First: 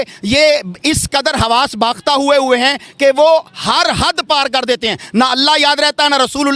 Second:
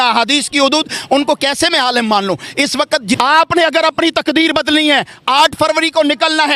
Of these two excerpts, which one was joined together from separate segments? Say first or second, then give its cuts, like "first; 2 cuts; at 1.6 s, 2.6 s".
second; 1 cut; at 3.2 s